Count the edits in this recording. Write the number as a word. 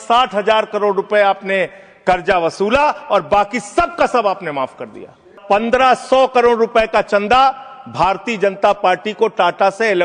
one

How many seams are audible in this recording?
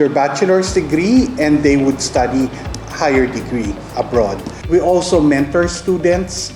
one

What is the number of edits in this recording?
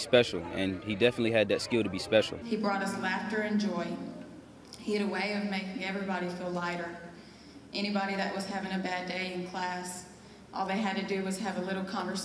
one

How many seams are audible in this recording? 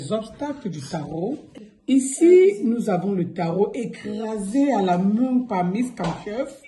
one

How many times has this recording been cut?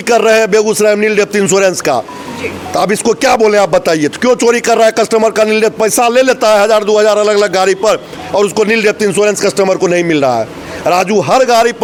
zero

